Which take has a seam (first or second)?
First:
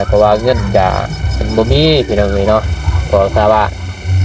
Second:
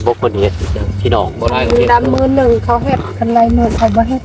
second